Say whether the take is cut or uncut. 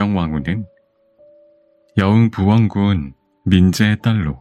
uncut